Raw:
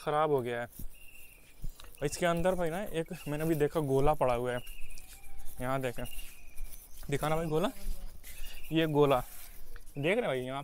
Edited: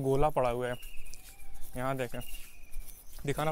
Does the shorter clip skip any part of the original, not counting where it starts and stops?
no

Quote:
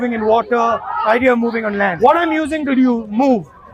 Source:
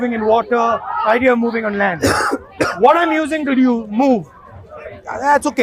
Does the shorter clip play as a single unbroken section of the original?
no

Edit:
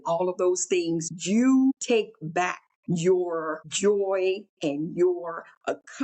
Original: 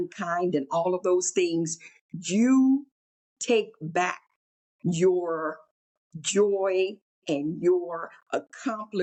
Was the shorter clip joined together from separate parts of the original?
yes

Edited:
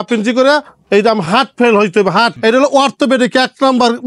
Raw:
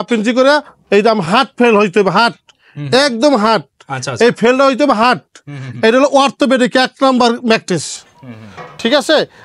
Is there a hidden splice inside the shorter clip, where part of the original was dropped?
yes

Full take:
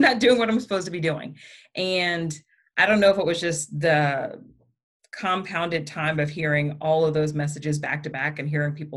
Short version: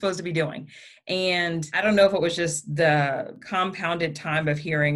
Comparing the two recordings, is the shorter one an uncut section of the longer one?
no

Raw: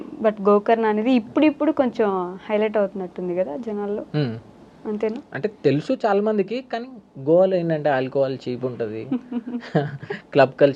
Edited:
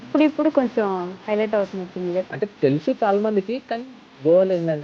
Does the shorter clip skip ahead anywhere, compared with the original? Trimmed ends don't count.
yes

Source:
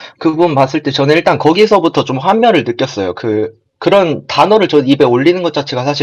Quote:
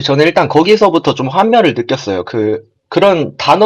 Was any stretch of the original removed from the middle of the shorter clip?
no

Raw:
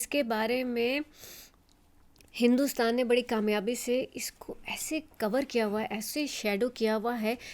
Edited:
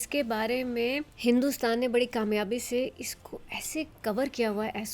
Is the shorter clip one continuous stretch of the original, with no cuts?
no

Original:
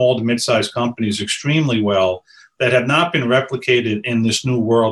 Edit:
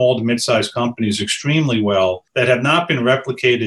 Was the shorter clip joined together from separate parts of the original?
yes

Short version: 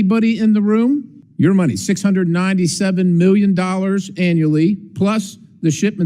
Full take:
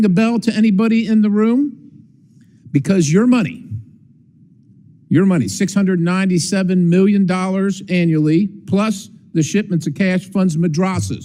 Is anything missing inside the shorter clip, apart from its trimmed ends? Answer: yes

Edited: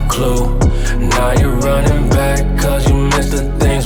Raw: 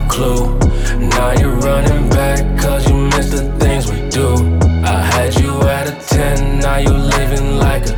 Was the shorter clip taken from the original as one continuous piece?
yes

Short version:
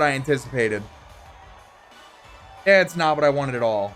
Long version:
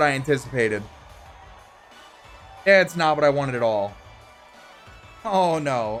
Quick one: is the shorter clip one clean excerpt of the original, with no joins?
yes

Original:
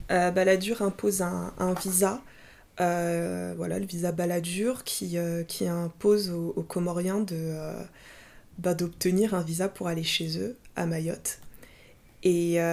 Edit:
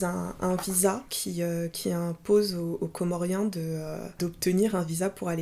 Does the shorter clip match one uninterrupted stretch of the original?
no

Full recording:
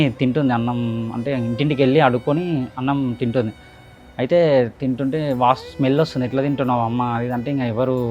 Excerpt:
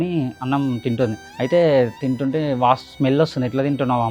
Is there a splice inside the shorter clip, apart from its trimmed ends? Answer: yes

